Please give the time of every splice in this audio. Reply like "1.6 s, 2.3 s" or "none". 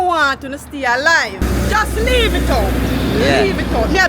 1.4 s